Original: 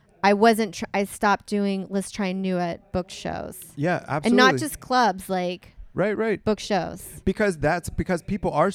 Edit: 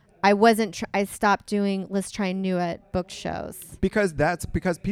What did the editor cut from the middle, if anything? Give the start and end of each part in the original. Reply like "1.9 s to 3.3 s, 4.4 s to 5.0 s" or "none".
3.6 s to 7.0 s